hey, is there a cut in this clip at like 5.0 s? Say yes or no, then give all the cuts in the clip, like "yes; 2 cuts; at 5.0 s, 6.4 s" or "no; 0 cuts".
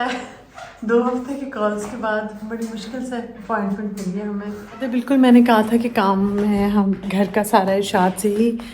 yes; 1 cut; at 5.0 s